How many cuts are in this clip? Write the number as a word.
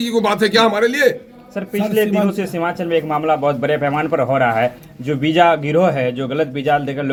zero